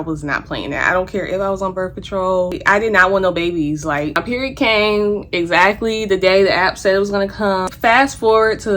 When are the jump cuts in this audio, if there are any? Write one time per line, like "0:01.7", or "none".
0:02.6
0:04.2
0:07.7